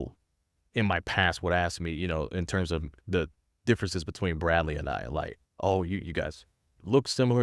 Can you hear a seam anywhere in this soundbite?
no; 0 cuts

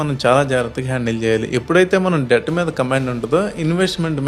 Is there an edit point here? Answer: no; 0 cuts

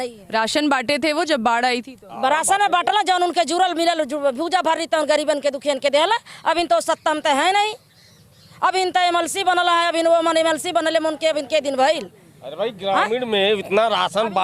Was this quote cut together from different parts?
no; 0 cuts

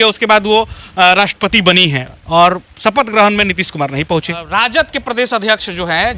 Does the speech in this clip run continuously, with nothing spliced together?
no; 1 cut; at 4.6 s

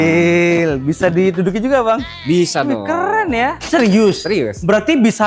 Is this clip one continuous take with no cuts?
no; 1 cut; at 3.6 s

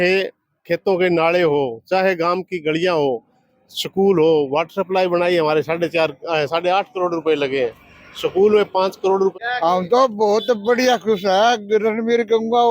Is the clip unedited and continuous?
no; 1 cut; at 9.3 s

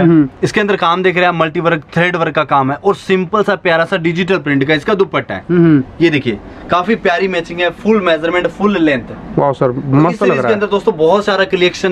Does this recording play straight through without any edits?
yes; 0 cuts

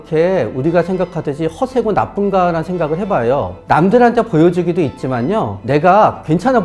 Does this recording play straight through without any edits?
yes; 0 cuts

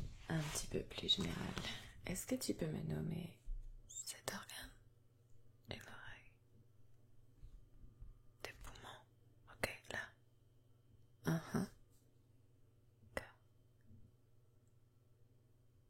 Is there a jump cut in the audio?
no; 0 cuts

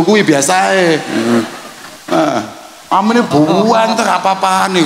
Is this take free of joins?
yes; 0 cuts

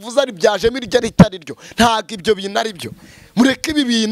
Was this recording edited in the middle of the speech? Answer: no; 0 cuts

